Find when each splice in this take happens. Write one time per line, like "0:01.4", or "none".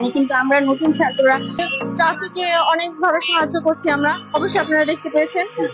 0:01.6